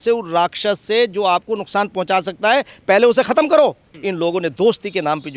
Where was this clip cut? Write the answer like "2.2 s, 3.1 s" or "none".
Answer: 3.9 s